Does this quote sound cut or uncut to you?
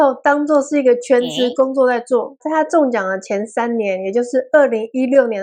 cut